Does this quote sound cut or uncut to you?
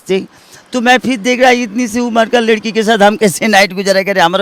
uncut